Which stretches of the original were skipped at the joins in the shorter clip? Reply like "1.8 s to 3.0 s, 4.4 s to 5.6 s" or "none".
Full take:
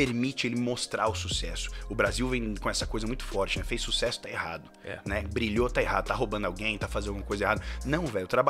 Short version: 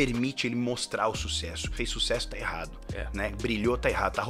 1.7 s to 3.6 s